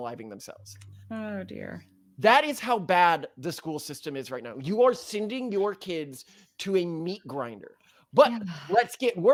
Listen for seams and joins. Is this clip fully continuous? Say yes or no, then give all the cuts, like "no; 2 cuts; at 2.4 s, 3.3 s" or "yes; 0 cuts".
yes; 0 cuts